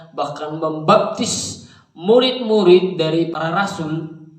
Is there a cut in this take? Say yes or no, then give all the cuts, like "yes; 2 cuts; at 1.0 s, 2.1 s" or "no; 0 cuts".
yes; 1 cut; at 3.3 s